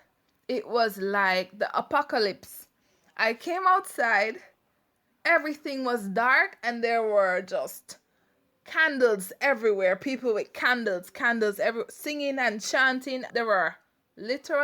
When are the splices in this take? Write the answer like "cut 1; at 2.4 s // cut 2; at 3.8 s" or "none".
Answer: cut 1; at 13.3 s